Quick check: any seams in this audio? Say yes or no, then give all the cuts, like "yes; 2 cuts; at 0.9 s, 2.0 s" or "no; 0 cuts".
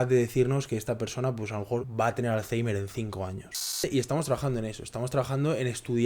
yes; 2 cuts; at 1.9 s, 3.8 s